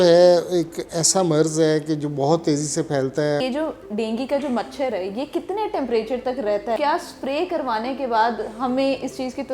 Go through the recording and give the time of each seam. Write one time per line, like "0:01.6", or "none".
0:03.4
0:06.8